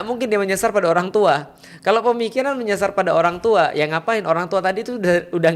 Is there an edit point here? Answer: no; 0 cuts

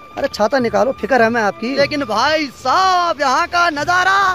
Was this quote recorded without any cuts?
no; 1 cut; at 1.7 s

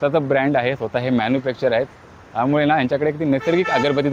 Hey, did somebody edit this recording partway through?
no; 0 cuts

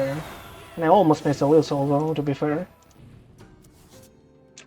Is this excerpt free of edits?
no; 1 cut; at 3.0 s

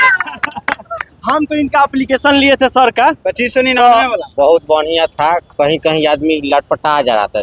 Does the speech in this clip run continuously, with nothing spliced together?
no; 1 cut; at 4.2 s

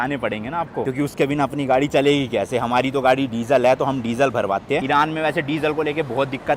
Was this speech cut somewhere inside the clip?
no; 0 cuts

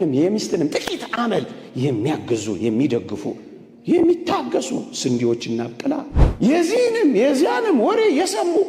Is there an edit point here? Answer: yes; 1 cut; at 6.2 s

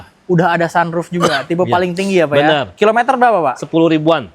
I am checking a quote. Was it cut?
no; 0 cuts

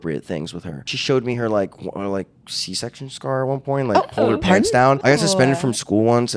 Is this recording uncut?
no; 2 cuts; at 0.9 s, 5.0 s

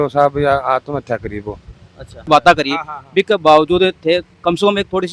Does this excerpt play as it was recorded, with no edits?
no; 1 cut; at 2.3 s

